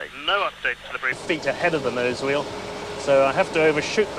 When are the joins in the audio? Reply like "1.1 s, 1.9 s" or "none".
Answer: none